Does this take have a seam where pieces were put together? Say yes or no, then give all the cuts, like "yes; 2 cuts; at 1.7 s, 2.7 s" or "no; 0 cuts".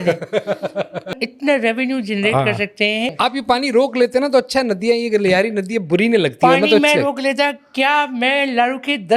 yes; 2 cuts; at 1.3 s, 3.1 s